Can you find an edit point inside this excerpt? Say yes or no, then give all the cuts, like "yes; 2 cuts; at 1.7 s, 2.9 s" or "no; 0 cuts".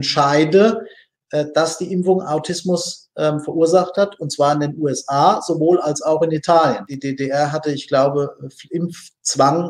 yes; 1 cut; at 6.9 s